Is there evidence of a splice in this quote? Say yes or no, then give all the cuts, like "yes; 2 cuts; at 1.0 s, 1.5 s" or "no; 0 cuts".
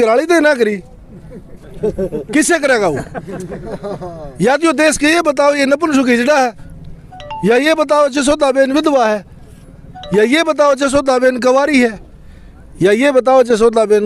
no; 0 cuts